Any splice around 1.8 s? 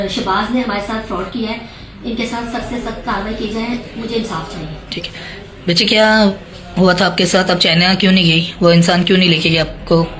no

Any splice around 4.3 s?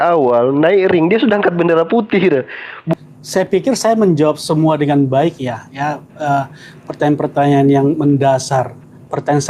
no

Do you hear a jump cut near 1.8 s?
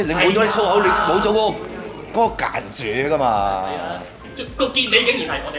no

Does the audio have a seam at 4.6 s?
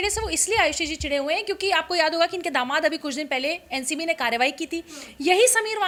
no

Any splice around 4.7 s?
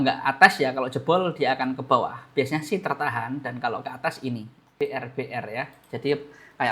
yes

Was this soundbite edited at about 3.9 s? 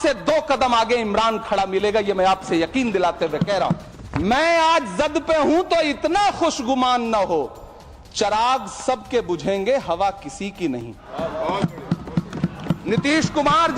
yes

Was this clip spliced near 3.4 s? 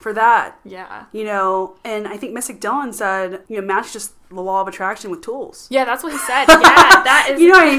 yes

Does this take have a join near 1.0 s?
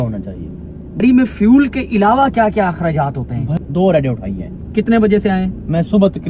yes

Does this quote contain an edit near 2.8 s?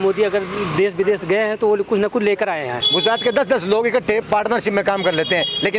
yes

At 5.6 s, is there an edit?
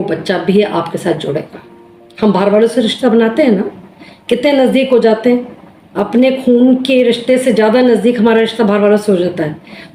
no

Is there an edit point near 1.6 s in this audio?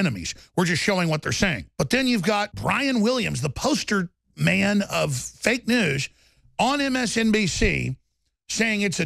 yes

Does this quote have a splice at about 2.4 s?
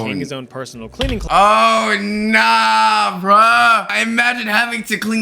no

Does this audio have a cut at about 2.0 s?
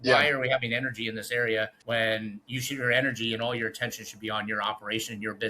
yes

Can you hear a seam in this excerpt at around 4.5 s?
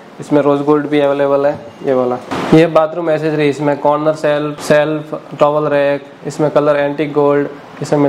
yes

